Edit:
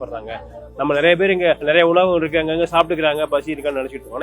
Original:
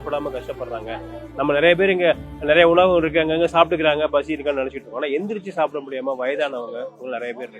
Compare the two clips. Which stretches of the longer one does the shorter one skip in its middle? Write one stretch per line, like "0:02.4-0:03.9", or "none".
0:02.2-0:02.4